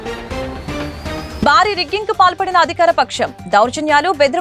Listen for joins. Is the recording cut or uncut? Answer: cut